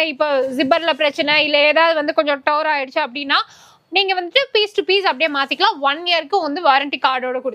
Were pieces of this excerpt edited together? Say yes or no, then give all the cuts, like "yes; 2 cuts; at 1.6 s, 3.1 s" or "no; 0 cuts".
no; 0 cuts